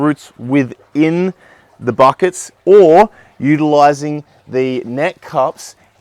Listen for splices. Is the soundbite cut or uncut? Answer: cut